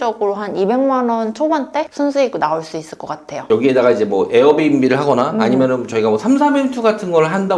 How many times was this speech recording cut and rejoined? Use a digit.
1